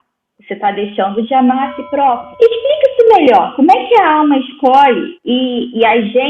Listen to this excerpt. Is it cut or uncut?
cut